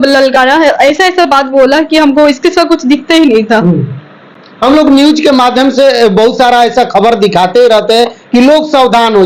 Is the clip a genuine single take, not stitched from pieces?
yes; 0 cuts

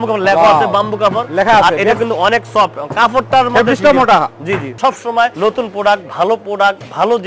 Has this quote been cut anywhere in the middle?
yes; 1 cut; at 4.7 s

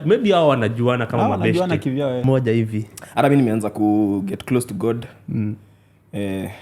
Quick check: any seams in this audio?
yes; 1 cut; at 2.2 s

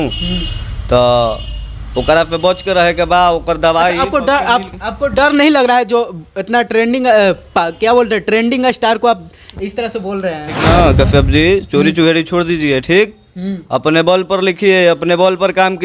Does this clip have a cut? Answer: yes; 1 cut; at 10.5 s

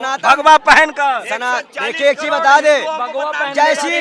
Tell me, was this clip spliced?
no; 0 cuts

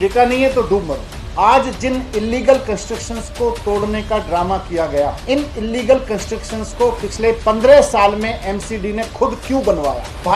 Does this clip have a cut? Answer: yes; 1 cut; at 1.2 s

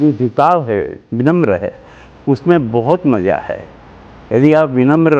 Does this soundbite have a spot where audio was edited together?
yes; 1 cut; at 1.0 s

